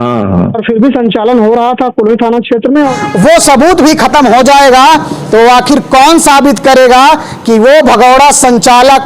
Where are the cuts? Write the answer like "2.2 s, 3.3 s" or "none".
3.0 s